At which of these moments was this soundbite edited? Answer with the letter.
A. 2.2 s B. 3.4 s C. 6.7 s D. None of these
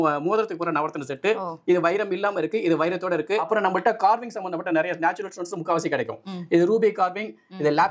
B